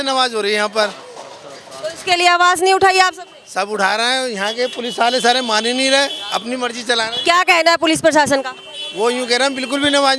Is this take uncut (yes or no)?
yes